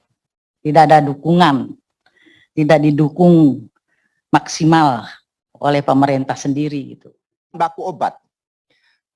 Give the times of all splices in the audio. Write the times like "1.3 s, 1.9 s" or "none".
7.5 s